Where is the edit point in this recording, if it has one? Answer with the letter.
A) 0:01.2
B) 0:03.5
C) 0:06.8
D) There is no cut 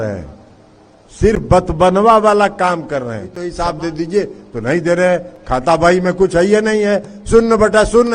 B